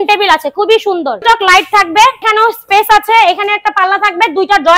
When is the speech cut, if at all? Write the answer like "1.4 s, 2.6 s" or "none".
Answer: 1.2 s, 2.2 s